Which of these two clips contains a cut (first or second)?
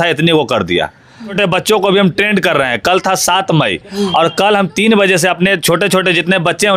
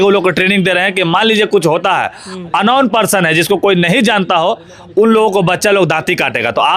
first